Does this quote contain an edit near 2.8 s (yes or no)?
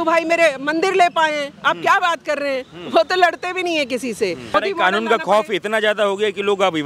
no